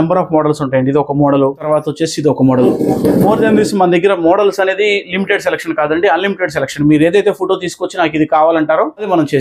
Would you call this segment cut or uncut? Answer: uncut